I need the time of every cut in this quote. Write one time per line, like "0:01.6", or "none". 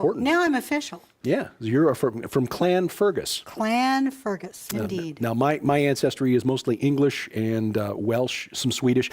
0:06.8